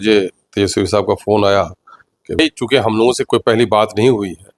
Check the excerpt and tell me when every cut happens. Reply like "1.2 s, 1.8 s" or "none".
2.4 s